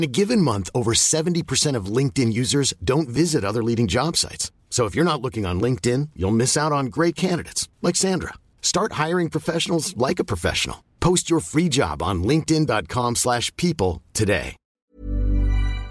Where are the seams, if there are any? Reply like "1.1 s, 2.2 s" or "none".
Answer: 14.9 s